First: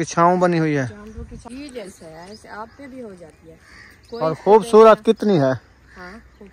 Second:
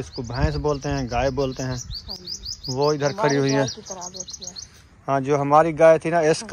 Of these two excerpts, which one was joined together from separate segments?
first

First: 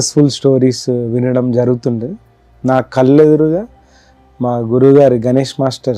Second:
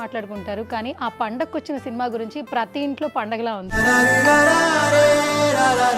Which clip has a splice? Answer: second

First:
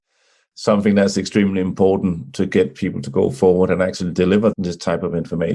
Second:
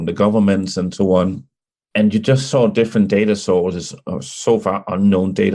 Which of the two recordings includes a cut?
first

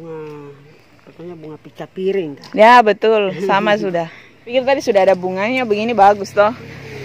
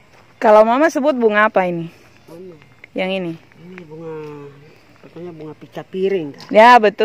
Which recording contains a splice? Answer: first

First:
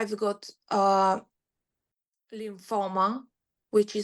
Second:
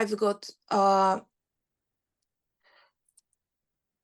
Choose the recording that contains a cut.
first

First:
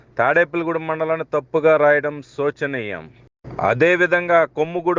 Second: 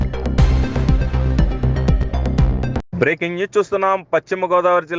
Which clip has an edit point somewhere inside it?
second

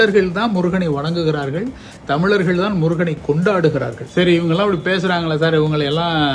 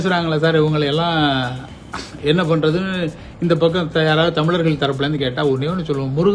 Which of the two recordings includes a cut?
first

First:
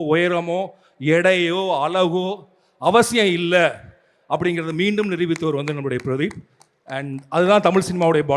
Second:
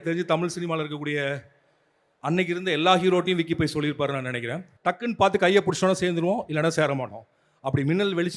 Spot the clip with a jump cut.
second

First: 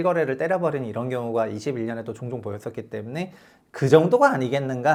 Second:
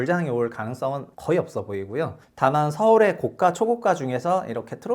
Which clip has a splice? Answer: second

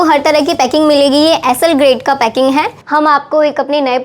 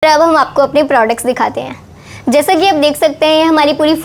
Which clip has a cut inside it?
first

